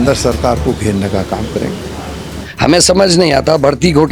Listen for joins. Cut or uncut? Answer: cut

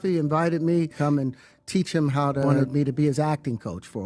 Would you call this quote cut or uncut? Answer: cut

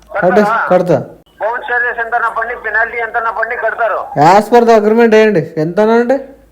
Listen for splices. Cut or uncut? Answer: cut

